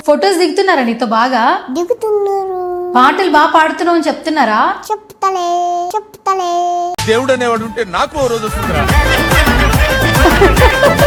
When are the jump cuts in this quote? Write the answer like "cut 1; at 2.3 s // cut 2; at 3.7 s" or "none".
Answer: none